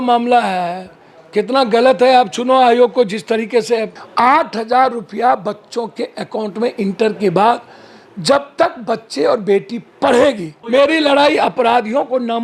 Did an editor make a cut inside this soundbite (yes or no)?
yes